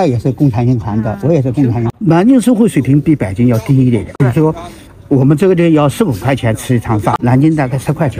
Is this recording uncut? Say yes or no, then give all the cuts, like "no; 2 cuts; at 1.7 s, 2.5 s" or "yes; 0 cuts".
yes; 0 cuts